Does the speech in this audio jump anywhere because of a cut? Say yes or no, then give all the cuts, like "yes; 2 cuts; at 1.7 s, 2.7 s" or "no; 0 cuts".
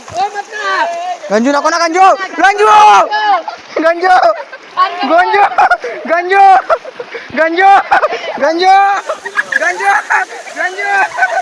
no; 0 cuts